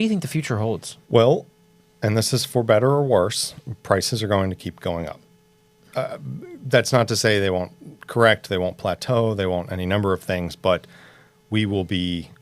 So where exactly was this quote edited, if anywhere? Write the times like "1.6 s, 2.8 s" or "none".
0.9 s